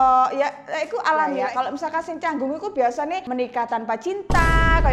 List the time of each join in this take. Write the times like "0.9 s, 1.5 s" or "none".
1.4 s, 3.2 s